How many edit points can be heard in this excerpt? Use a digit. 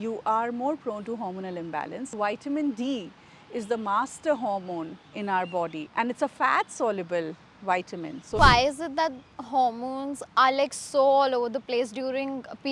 3